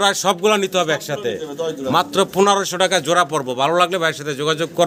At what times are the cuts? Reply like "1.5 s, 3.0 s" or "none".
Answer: none